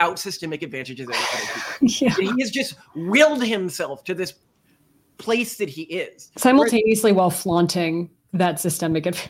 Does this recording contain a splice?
no; 0 cuts

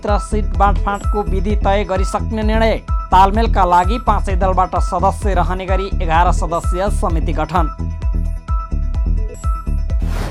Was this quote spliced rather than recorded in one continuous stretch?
no; 0 cuts

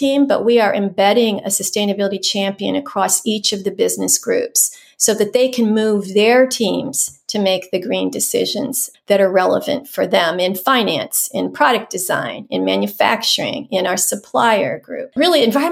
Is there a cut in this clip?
no; 0 cuts

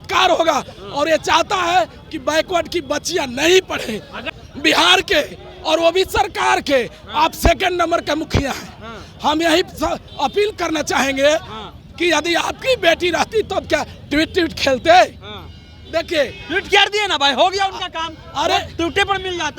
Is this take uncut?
no; 1 cut; at 4.4 s

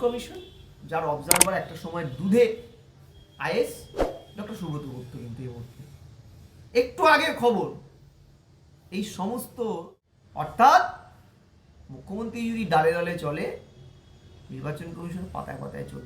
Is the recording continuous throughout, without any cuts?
no; 1 cut; at 10.5 s

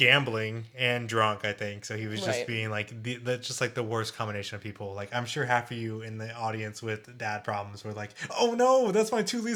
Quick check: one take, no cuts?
yes; 0 cuts

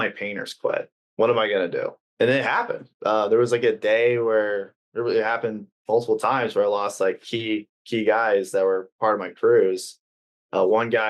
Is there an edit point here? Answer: yes; 2 cuts; at 1.0 s, 2.0 s

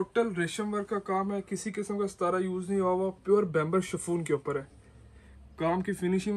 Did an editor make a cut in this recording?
no; 0 cuts

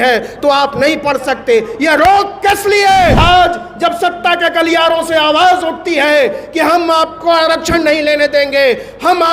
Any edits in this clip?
yes; 1 cut; at 3.2 s

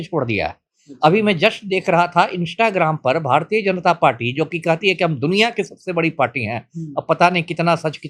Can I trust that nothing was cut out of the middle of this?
yes; 0 cuts

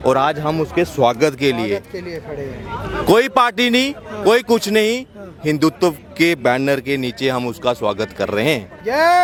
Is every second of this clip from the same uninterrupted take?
yes; 0 cuts

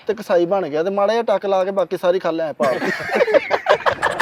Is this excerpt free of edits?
yes; 0 cuts

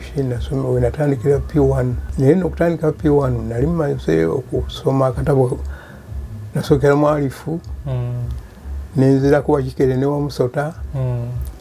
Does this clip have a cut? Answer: yes; 1 cut; at 2.0 s

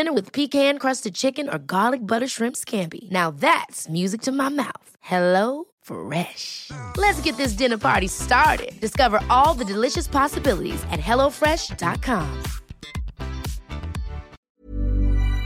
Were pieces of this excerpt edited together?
yes; 1 cut; at 14.6 s

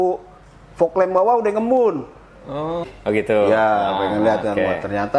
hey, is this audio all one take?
no; 1 cut; at 2.9 s

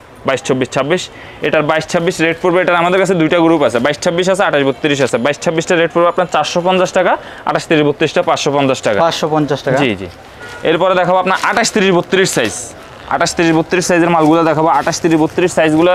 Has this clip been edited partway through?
no; 0 cuts

